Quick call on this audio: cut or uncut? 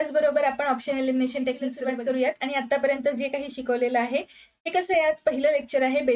cut